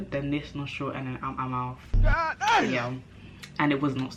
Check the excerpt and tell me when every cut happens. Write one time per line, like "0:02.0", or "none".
none